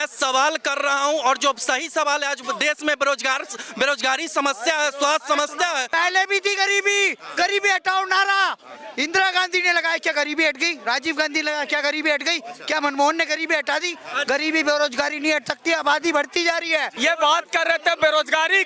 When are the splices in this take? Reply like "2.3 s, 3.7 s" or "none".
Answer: 6.0 s, 16.9 s